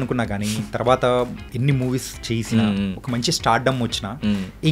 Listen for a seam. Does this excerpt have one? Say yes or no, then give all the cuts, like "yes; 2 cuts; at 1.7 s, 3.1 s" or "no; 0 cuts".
no; 0 cuts